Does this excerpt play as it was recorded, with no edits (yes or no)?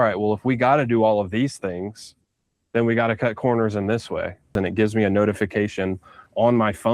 no